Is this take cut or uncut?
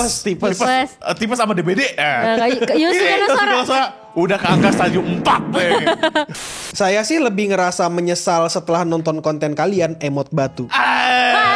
cut